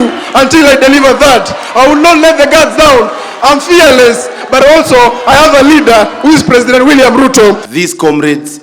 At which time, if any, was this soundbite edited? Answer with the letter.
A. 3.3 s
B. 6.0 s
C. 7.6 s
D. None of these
C